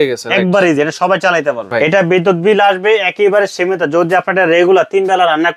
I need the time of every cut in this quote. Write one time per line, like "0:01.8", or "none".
0:01.6